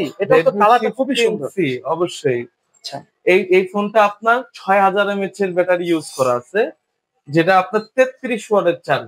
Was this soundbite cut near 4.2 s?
no; 0 cuts

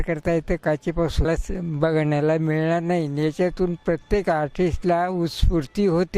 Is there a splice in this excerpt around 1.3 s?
yes; 1 cut; at 1.3 s

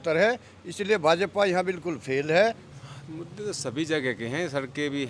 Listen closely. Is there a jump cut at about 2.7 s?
yes; 1 cut; at 2.7 s

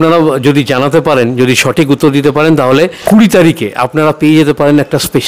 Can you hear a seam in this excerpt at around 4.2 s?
no; 1 cut; at 3.0 s

